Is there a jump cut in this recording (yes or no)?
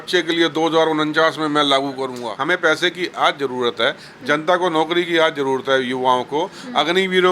yes